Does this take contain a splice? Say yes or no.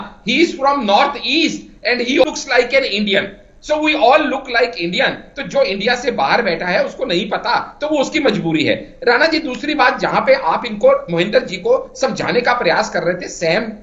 yes